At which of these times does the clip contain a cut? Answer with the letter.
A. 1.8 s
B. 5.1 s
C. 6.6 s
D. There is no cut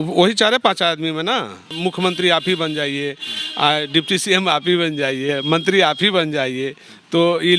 A